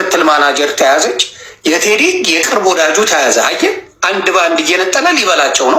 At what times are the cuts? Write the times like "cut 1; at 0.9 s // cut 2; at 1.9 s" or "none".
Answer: none